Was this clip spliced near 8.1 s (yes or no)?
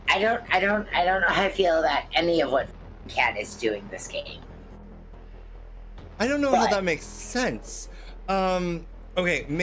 no